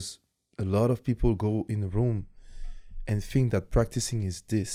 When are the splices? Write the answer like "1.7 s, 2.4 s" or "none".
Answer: none